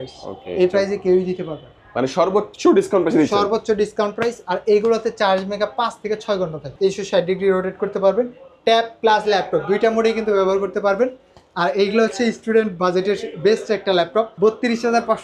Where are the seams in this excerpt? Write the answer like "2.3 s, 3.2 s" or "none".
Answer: 6.6 s, 14.3 s